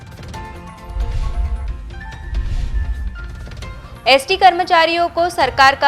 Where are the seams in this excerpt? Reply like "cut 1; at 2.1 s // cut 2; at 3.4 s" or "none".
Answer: cut 1; at 1.0 s